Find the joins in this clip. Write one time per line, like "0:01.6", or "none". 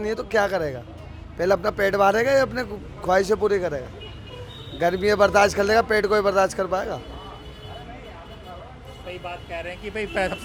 none